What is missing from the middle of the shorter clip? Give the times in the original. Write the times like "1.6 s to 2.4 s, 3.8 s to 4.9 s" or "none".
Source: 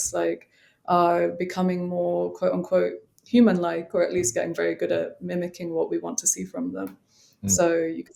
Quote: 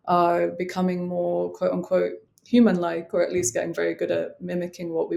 none